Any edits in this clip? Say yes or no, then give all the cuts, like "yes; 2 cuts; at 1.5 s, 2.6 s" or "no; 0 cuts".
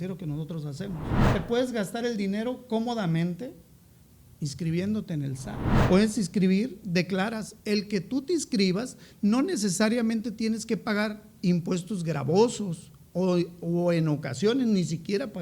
yes; 2 cuts; at 1.3 s, 5.8 s